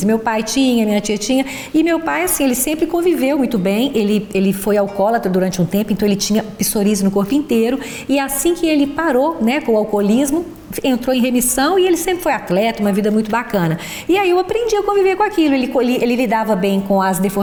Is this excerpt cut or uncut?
uncut